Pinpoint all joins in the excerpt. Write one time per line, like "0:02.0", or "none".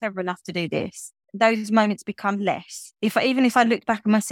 0:01.2